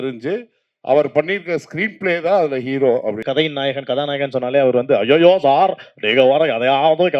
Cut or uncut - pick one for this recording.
cut